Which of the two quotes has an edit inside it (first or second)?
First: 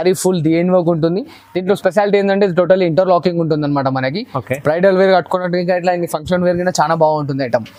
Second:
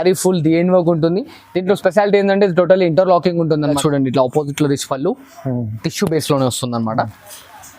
second